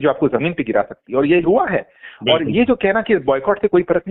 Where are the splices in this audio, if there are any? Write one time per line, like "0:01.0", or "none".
none